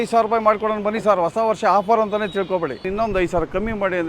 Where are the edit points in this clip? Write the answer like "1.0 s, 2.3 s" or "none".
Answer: 2.9 s